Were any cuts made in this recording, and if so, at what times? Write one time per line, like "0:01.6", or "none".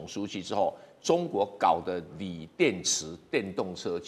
none